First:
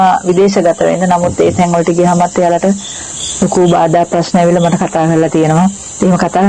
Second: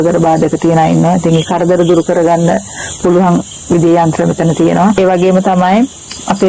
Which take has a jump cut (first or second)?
second